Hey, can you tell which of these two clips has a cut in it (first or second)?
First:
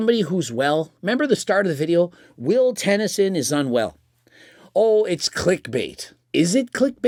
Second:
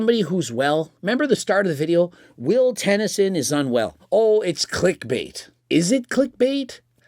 second